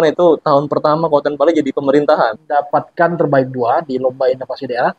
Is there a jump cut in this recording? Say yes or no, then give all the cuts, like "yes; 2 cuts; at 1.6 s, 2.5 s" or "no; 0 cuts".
yes; 1 cut; at 2.4 s